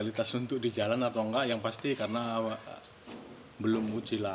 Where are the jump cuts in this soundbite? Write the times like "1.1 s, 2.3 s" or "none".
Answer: none